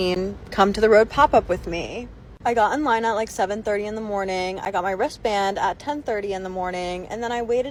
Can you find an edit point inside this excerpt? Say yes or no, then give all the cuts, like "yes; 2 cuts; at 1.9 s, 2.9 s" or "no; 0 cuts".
no; 0 cuts